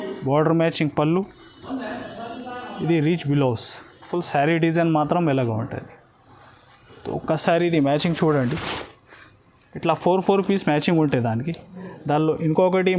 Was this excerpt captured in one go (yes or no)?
yes